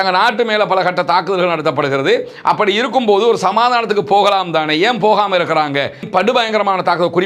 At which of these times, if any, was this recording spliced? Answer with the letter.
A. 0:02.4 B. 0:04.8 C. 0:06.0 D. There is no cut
C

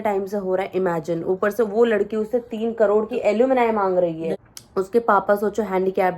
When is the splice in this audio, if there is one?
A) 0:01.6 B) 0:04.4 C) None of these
B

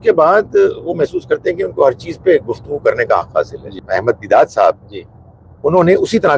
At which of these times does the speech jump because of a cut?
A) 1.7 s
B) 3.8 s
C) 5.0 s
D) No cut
B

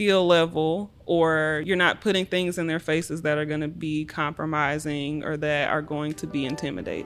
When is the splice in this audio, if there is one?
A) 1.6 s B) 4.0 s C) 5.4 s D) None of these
A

